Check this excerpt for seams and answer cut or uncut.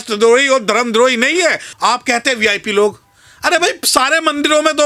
cut